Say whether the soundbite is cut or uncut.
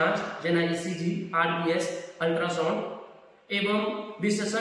uncut